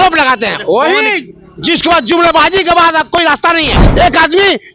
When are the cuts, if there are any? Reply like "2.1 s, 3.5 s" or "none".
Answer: 3.8 s